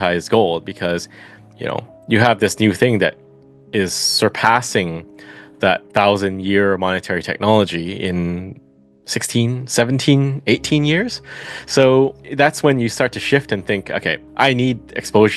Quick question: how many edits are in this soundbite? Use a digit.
2